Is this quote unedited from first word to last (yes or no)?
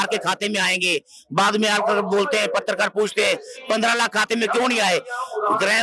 yes